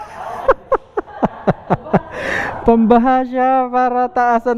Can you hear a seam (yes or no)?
no